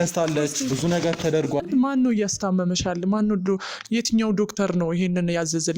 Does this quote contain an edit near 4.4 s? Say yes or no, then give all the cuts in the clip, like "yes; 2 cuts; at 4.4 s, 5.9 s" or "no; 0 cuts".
no; 1 cut; at 1.7 s